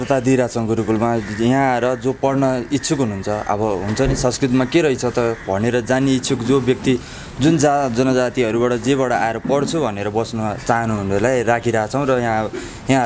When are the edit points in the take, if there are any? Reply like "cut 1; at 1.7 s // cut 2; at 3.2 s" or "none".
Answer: none